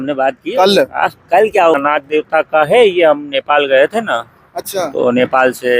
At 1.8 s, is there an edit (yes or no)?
yes